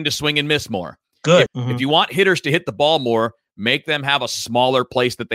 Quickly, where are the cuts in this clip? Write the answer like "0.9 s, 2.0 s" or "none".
1.5 s